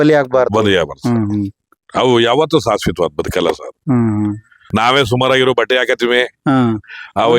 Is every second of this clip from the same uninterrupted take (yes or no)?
no